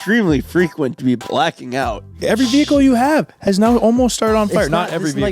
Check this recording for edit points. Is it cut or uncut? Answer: cut